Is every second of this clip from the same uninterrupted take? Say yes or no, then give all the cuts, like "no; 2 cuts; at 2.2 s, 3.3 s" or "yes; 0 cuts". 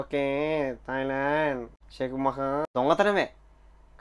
no; 1 cut; at 2.7 s